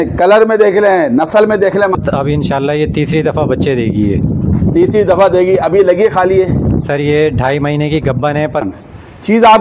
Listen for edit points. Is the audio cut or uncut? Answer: cut